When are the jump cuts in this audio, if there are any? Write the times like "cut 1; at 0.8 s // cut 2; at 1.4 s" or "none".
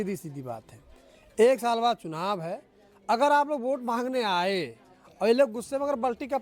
none